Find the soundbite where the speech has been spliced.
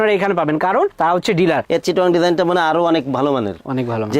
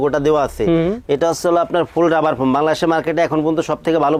first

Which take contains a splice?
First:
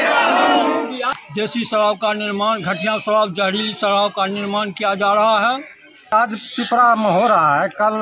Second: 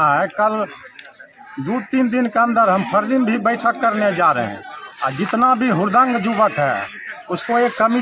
first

